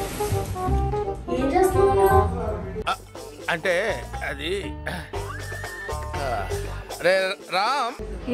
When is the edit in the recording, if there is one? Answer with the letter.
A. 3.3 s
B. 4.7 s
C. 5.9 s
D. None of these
D